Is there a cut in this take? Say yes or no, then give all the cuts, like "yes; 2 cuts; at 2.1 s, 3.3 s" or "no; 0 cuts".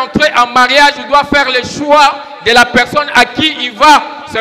no; 0 cuts